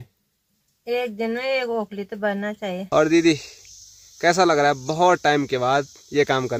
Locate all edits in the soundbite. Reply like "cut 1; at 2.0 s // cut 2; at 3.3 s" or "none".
cut 1; at 2.8 s